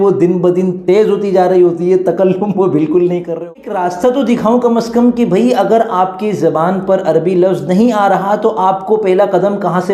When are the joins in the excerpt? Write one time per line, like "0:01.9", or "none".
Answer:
0:03.3